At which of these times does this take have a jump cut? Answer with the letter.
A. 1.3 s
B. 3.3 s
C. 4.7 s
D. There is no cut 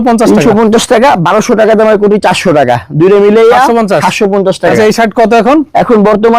C